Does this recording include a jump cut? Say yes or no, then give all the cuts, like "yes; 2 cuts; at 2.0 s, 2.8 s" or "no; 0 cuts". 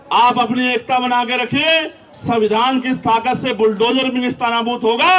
no; 0 cuts